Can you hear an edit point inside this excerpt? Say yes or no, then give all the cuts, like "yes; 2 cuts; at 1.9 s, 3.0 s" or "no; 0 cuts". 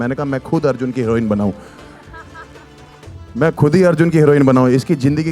no; 0 cuts